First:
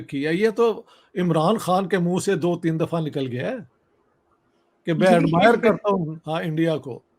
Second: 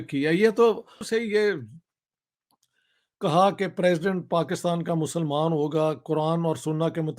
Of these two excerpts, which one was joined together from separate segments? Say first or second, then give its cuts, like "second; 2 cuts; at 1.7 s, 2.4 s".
second; 1 cut; at 1.0 s